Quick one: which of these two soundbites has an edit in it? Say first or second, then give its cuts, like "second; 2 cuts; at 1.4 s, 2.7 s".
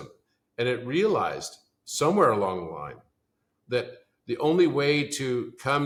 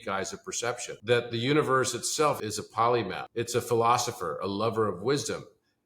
second; 3 cuts; at 0.9 s, 2.4 s, 3.2 s